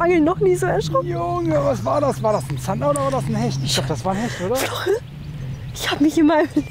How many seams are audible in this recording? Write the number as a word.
zero